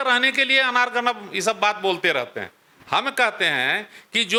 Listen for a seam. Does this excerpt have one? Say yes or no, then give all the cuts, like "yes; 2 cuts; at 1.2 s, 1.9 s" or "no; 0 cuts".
no; 0 cuts